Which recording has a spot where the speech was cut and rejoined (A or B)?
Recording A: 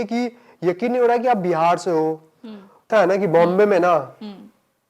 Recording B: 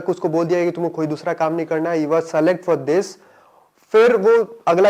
A